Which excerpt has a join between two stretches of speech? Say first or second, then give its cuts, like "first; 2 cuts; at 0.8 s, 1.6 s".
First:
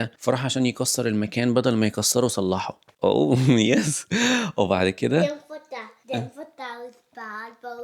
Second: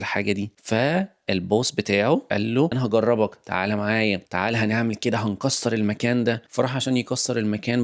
second; 2 cuts; at 2.7 s, 4.2 s